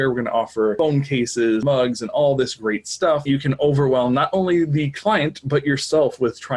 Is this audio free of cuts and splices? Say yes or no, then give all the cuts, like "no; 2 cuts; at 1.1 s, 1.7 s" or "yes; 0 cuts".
no; 3 cuts; at 0.8 s, 1.6 s, 3.2 s